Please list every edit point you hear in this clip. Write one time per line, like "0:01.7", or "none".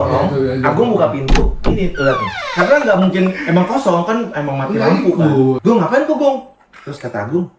0:05.6